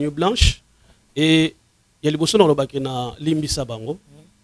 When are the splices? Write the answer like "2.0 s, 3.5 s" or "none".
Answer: none